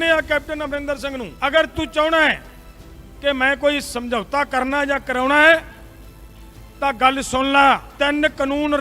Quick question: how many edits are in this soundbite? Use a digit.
2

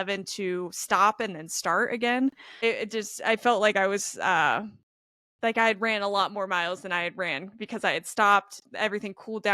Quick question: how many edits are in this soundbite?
1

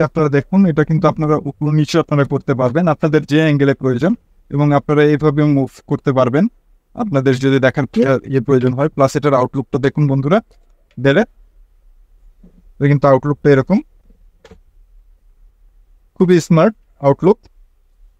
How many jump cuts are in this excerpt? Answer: 0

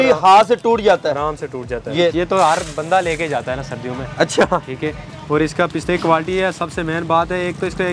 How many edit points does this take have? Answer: 1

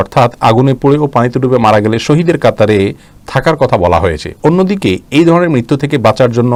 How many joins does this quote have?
0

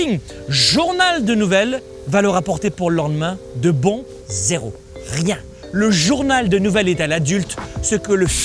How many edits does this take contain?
3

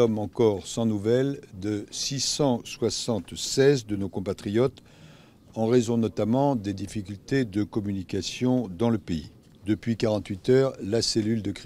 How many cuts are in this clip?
1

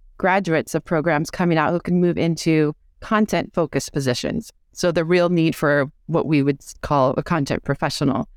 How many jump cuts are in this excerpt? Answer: 0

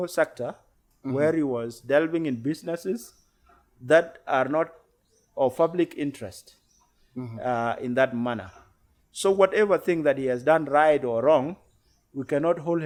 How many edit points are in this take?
0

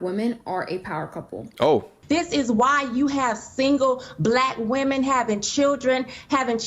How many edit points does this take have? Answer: 1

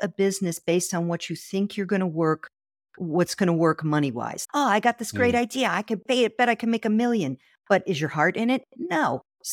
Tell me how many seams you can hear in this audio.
0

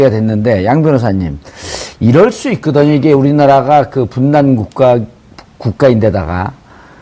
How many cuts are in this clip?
1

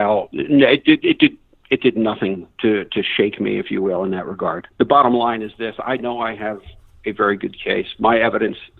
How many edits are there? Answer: 1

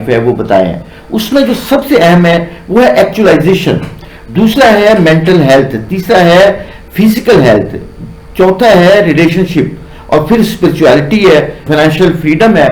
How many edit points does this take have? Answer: 0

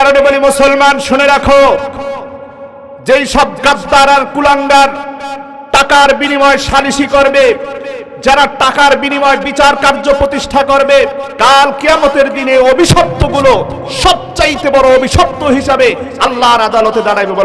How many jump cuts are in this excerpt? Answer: 1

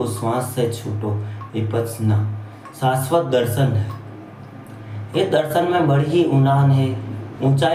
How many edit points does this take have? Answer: 0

